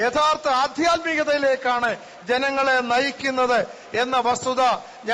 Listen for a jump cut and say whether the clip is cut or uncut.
uncut